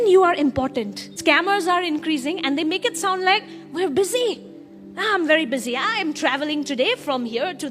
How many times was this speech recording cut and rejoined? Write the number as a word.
one